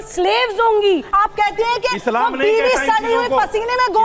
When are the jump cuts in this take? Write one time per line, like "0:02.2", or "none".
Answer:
0:01.1